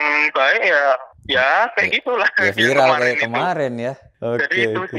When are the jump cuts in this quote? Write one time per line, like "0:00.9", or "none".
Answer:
none